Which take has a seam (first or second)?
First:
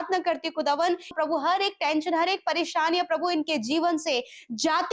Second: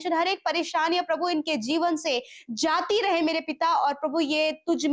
first